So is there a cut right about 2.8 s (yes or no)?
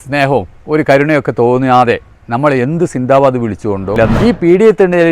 no